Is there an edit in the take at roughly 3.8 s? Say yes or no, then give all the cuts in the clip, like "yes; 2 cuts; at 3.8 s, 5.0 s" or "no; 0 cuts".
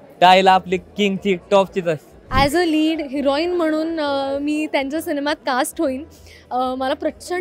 no; 1 cut; at 2.1 s